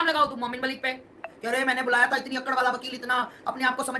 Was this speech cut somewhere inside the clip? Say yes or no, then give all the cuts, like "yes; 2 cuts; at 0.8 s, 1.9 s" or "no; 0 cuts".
yes; 1 cut; at 1.3 s